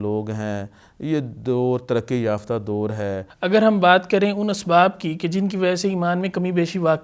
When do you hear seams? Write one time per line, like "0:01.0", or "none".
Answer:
0:03.3